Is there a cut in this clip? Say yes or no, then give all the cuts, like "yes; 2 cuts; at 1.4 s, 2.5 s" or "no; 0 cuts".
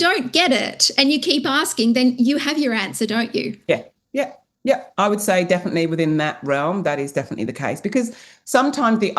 no; 0 cuts